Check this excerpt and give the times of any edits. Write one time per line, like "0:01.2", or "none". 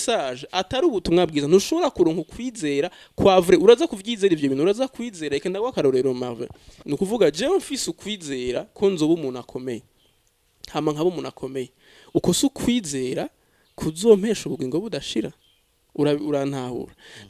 0:06.7